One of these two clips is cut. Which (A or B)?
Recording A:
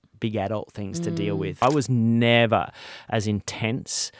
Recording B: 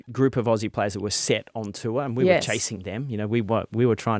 A